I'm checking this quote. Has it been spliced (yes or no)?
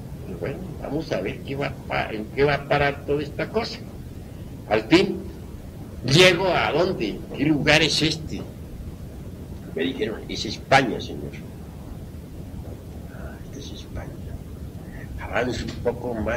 no